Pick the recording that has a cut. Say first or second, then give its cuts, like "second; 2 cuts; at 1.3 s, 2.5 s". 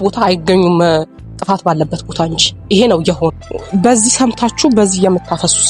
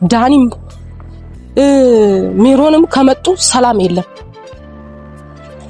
first; 1 cut; at 3.3 s